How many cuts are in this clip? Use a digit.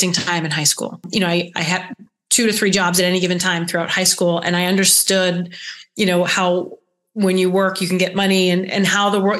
1